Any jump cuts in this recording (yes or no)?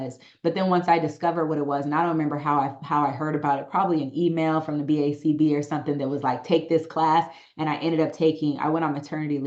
no